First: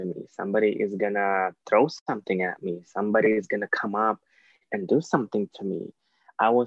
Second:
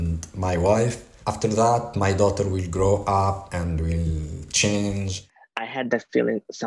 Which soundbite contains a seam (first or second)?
second